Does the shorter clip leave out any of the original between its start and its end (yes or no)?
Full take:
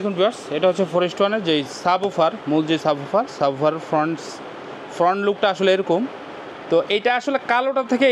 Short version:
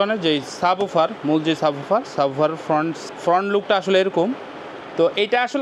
yes